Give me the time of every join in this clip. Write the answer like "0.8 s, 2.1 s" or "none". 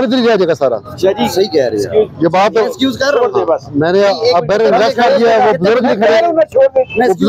none